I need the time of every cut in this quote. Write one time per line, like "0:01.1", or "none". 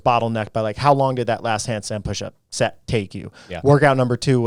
none